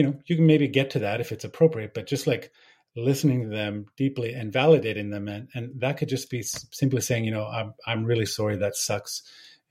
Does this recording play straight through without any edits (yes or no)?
yes